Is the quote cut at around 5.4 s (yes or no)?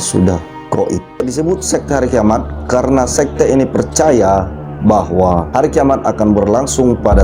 no